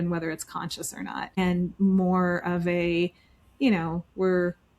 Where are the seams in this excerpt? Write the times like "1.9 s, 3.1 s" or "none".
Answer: 1.4 s